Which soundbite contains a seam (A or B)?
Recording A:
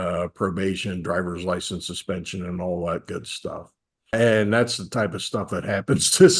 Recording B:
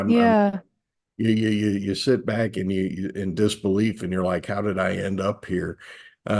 A